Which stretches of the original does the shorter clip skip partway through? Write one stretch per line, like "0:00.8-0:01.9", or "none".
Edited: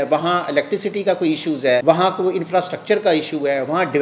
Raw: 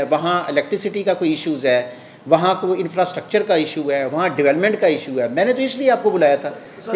0:01.8-0:02.3